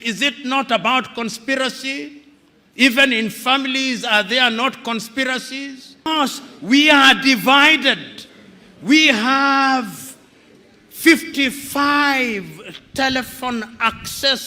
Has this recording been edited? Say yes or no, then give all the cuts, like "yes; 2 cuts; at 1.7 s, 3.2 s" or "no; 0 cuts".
yes; 1 cut; at 6.1 s